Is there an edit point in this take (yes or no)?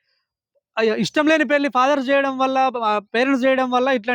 no